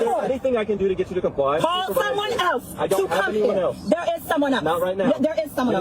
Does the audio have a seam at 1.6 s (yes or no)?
yes